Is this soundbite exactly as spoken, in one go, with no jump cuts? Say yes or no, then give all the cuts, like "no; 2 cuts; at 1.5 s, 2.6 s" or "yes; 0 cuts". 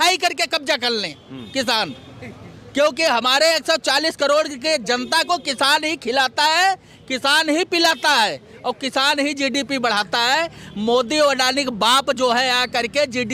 yes; 0 cuts